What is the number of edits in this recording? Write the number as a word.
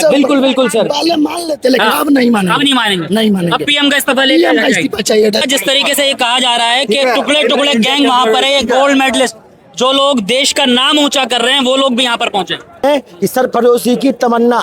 two